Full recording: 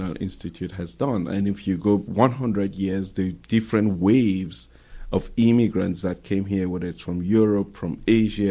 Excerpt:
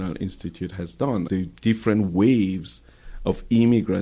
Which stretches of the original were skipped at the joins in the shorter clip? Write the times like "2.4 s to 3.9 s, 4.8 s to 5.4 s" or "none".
1.3 s to 3.1 s